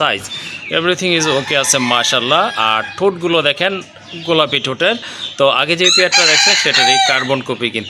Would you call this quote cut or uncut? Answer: uncut